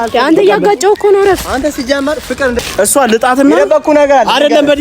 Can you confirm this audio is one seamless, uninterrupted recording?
no; 1 cut; at 2.6 s

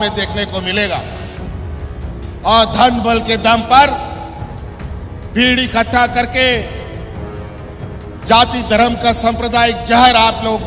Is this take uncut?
yes; 0 cuts

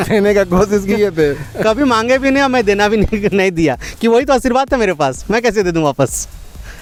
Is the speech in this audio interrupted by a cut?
no; 0 cuts

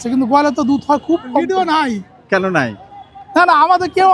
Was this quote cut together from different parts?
yes; 1 cut; at 1.4 s

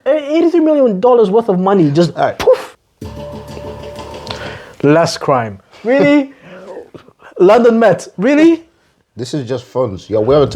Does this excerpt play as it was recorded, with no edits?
no; 1 cut; at 2.7 s

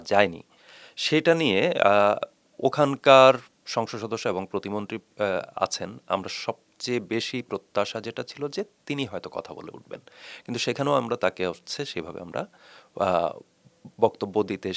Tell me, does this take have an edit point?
no; 0 cuts

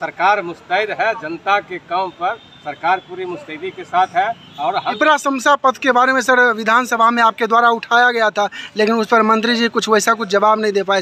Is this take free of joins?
yes; 0 cuts

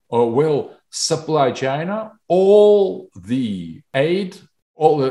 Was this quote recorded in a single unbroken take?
no; 1 cut; at 3.8 s

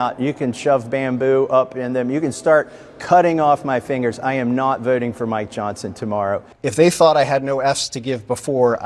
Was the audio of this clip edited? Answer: yes; 1 cut; at 6.6 s

